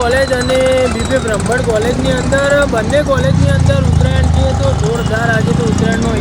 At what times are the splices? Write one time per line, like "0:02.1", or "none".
none